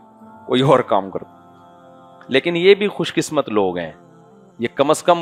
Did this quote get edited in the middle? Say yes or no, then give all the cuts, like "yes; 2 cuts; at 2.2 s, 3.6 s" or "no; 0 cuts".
no; 0 cuts